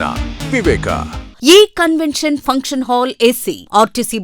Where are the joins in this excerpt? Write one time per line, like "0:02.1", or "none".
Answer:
0:01.2